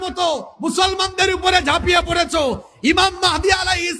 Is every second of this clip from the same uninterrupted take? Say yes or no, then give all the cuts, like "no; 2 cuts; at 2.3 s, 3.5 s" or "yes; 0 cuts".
yes; 0 cuts